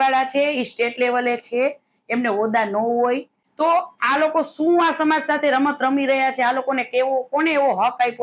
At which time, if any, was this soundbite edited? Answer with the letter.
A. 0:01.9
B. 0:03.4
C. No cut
B